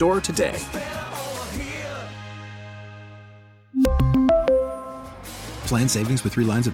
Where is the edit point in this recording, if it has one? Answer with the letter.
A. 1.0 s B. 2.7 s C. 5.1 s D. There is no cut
D